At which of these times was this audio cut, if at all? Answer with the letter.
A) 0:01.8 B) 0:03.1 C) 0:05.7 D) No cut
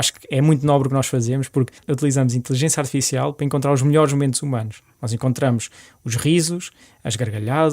A